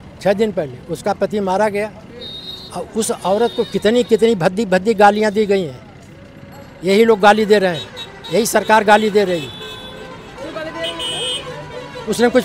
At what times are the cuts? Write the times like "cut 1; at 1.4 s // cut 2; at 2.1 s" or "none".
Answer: none